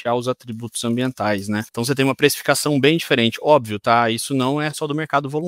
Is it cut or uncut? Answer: cut